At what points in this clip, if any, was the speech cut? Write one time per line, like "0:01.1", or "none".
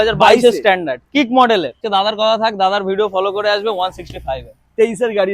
0:01.8